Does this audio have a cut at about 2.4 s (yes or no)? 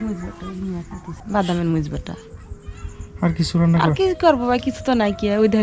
no